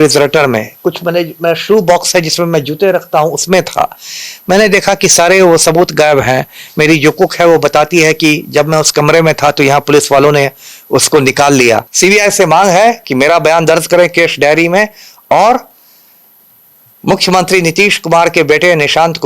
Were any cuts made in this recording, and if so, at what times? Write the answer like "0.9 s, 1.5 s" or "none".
11.9 s